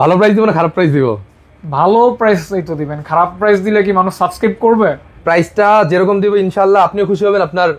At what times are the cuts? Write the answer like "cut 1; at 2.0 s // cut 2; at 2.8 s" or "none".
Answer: cut 1; at 5.1 s